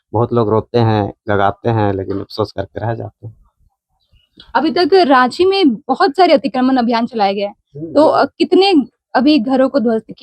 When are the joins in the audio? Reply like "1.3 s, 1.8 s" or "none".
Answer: none